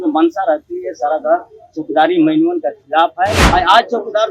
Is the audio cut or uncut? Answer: cut